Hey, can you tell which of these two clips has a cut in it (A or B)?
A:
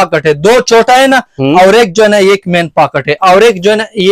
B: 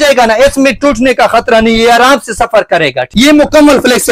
B